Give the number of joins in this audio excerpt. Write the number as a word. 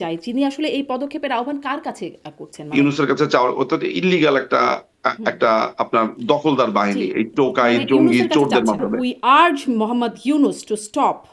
two